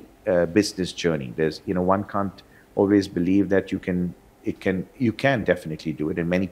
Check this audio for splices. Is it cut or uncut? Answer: uncut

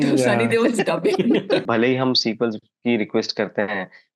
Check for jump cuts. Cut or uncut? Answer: cut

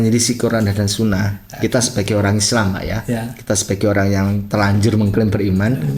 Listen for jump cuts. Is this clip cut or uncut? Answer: uncut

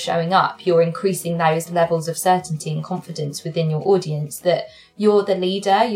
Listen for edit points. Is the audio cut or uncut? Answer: uncut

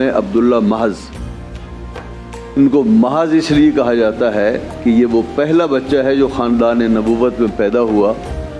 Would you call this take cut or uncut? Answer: uncut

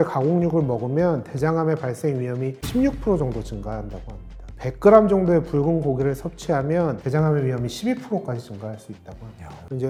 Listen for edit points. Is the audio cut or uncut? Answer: uncut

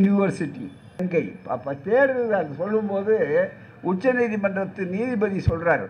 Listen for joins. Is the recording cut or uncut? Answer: cut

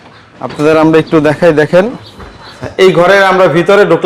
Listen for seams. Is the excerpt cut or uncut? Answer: cut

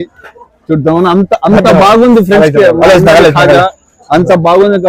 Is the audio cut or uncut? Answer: uncut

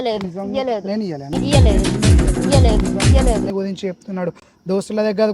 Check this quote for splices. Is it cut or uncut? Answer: cut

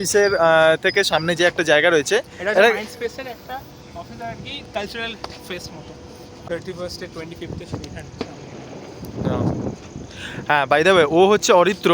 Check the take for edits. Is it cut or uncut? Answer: cut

